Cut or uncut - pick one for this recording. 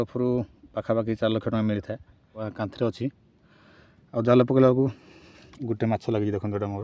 cut